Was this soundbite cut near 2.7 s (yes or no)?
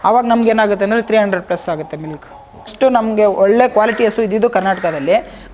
yes